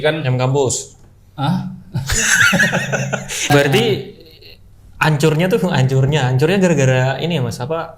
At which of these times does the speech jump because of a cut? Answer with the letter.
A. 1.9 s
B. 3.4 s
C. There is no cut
B